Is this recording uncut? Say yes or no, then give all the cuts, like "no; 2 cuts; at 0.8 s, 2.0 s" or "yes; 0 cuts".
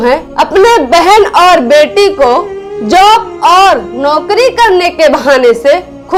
yes; 0 cuts